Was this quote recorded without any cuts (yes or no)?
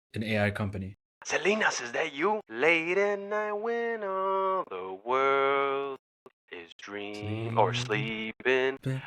no